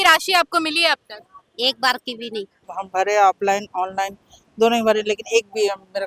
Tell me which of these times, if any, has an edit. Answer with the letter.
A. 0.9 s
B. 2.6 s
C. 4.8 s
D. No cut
B